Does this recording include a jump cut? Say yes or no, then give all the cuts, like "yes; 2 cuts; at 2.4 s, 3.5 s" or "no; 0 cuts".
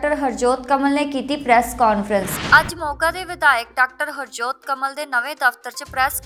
no; 0 cuts